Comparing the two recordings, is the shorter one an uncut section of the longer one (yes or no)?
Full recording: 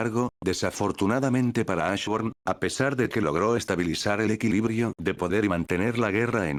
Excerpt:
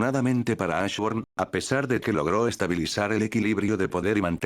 no